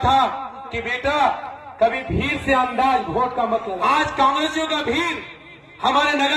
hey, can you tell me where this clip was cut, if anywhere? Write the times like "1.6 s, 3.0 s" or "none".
3.8 s